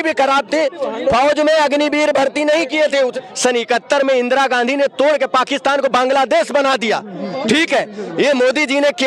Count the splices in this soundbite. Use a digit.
1